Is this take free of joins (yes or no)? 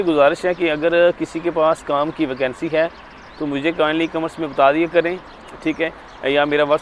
yes